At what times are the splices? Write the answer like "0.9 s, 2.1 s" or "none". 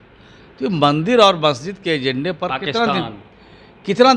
none